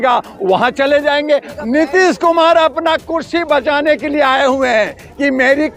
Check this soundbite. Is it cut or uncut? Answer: cut